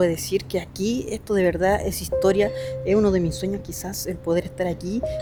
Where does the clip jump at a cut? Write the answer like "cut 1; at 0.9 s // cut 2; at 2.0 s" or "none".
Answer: none

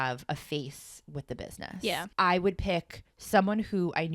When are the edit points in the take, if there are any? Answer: cut 1; at 2.1 s

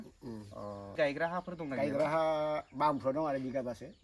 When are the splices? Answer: cut 1; at 0.9 s

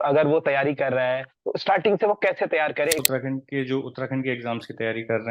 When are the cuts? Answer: cut 1; at 1.3 s // cut 2; at 3.0 s

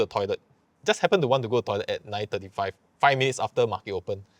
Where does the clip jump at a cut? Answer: none

